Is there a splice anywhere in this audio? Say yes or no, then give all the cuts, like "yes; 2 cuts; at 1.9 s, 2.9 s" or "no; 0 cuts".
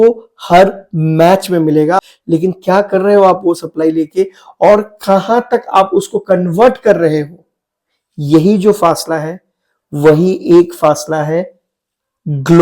yes; 1 cut; at 2.1 s